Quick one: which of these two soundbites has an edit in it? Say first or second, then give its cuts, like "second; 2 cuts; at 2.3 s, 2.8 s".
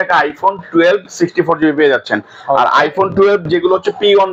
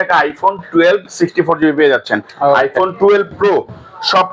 second; 1 cut; at 2.3 s